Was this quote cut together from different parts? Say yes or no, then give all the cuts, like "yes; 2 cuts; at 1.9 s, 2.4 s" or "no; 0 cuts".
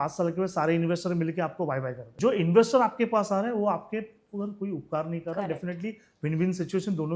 yes; 1 cut; at 2.2 s